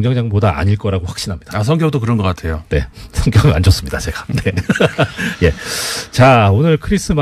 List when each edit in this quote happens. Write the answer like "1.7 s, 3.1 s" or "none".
1.1 s

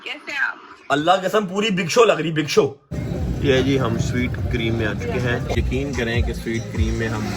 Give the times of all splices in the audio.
3.1 s, 5.6 s

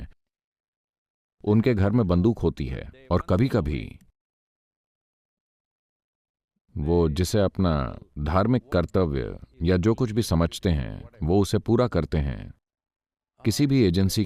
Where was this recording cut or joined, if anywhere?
none

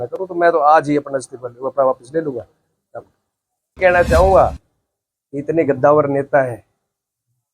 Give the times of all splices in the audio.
3.8 s

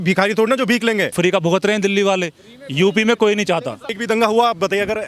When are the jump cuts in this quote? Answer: 1.1 s, 3.9 s

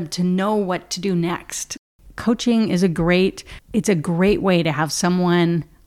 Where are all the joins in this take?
1.7 s

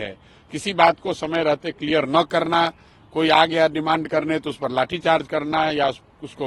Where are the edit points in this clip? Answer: none

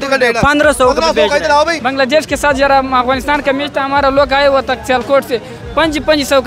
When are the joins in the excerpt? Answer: 1.8 s

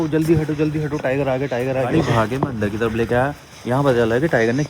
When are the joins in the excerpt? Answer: 1.9 s

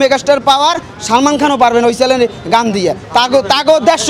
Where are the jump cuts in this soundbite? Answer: none

